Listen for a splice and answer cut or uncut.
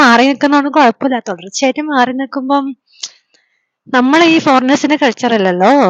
uncut